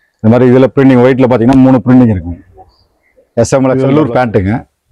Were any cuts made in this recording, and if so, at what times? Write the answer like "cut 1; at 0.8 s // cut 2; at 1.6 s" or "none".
cut 1; at 3.8 s